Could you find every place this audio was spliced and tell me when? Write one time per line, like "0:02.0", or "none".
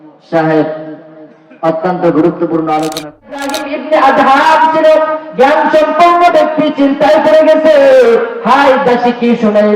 0:03.6